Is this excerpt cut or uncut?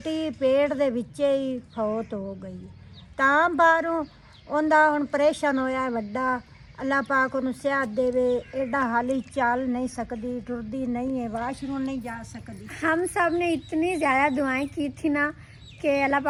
uncut